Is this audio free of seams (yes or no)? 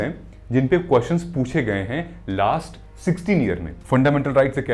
no